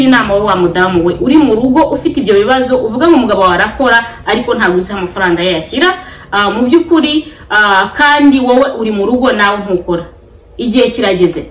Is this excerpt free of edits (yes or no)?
yes